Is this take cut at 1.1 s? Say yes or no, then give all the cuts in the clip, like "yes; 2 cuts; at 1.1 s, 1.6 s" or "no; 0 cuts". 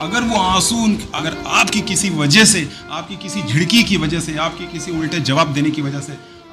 yes; 1 cut; at 1.1 s